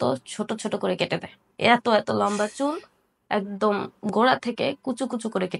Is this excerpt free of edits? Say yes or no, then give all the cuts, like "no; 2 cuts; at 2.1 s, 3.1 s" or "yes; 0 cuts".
yes; 0 cuts